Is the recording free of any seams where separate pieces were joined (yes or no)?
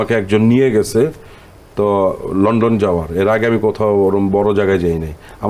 yes